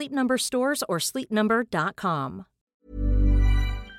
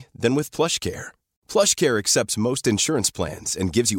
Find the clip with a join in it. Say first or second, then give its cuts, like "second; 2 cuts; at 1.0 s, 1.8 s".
first; 1 cut; at 2.7 s